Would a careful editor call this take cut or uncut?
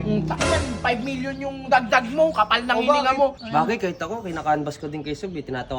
cut